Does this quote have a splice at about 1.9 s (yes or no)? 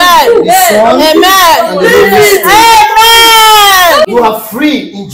no